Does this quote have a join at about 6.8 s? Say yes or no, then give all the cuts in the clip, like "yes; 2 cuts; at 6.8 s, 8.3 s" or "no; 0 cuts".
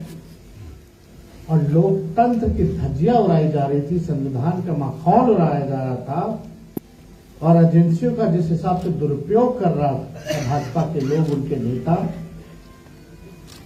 no; 0 cuts